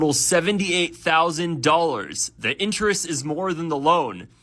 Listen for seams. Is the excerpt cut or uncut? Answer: uncut